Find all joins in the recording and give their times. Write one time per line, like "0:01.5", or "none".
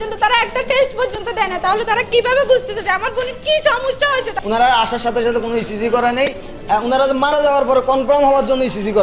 0:04.4

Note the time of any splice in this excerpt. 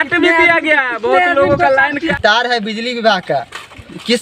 0:02.1

